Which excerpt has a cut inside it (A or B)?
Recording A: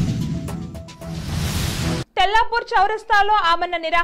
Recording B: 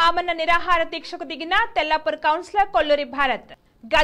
A